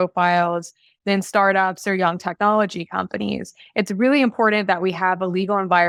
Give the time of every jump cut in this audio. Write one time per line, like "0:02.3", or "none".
none